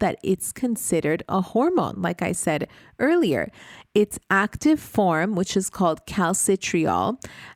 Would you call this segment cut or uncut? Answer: uncut